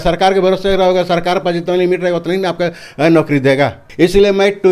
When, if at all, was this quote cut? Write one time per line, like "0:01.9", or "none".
0:03.8

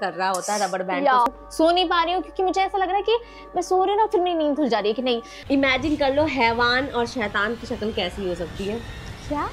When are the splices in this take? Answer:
0:01.3
0:05.4

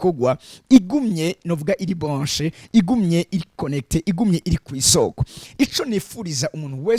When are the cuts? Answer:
none

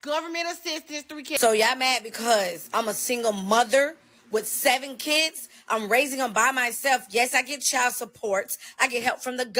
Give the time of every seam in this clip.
0:01.2

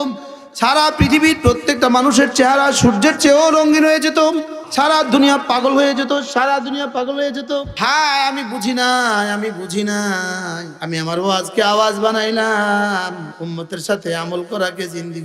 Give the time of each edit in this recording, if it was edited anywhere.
0:04.6
0:07.7
0:10.7
0:13.3

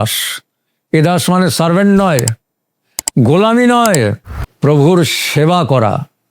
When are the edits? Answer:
none

